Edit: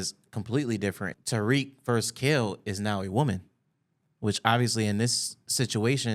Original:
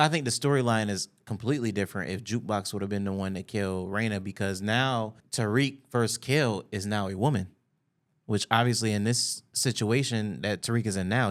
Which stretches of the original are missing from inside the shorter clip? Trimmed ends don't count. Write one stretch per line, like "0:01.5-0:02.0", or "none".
0:02.1-0:05.2